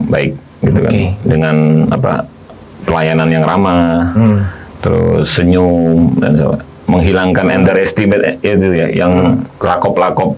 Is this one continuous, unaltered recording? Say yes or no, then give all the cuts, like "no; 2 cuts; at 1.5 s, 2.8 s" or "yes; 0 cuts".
yes; 0 cuts